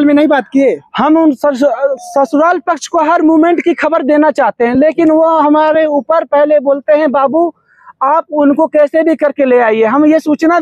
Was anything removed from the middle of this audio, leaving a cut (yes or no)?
no